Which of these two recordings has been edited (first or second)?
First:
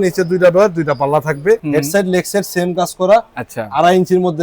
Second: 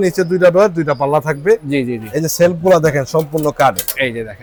first